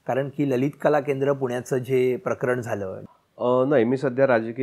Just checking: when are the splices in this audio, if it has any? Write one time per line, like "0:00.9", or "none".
0:03.0